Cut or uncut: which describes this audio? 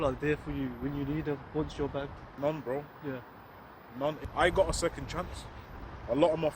cut